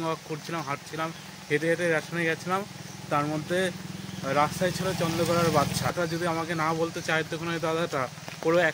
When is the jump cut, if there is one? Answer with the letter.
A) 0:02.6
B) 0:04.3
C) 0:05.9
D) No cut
C